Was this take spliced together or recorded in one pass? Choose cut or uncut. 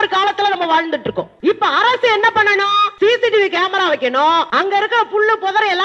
cut